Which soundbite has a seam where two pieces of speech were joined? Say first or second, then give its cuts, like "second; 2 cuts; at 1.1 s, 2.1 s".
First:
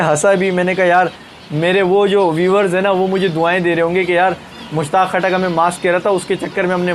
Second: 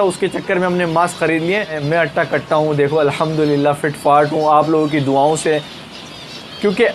second; 1 cut; at 1.8 s